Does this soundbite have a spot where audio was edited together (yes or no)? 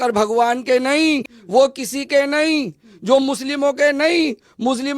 yes